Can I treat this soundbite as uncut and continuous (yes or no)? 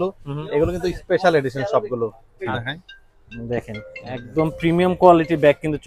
no